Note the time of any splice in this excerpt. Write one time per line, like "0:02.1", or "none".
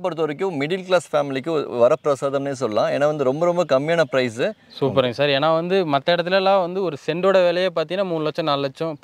0:04.6